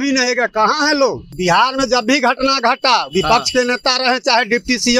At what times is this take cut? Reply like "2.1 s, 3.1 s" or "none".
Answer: 1.3 s

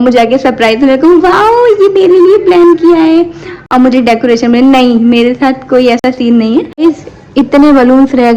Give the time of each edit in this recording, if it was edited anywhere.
6.7 s

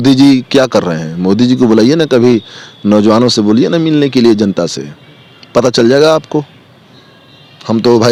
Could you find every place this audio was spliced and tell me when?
none

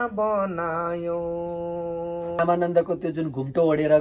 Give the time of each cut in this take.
2.4 s

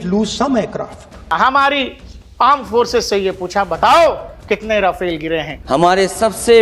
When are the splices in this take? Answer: 1.3 s, 5.5 s

